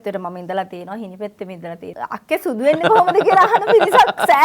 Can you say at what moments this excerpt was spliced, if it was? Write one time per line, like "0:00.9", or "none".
0:01.9

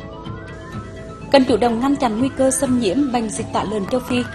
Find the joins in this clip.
0:00.9

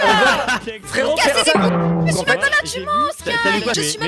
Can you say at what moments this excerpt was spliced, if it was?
0:02.1

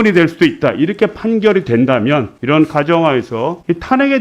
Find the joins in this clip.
none

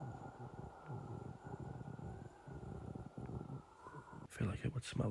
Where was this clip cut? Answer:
0:04.2

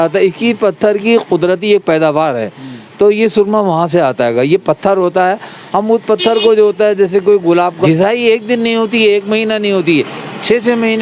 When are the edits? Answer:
0:07.8

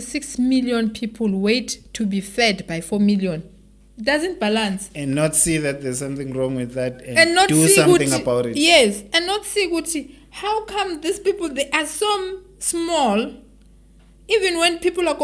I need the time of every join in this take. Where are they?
none

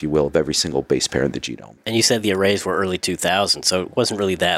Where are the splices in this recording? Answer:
0:01.8

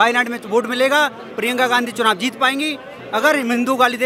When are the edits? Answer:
none

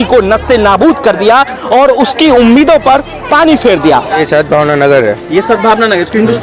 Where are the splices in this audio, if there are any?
0:04.2

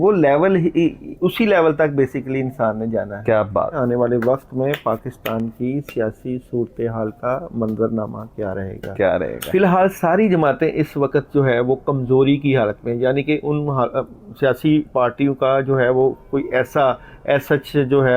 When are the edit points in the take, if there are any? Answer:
0:03.7
0:09.4

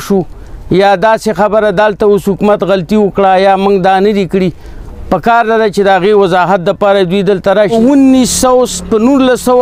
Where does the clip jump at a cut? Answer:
0:07.7

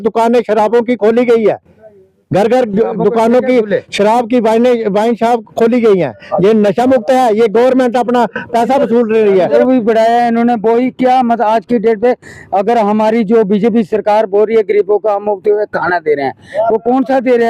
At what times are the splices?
0:09.6

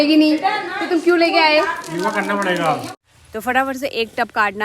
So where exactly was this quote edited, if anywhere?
0:02.9

